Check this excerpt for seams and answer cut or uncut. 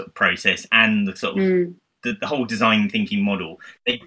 uncut